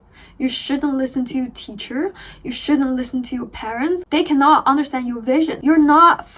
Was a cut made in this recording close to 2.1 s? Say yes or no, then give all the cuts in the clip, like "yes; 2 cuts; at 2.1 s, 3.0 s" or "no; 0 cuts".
no; 2 cuts; at 4.0 s, 5.6 s